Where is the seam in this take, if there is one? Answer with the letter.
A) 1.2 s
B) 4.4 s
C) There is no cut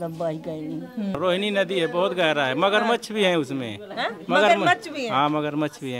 A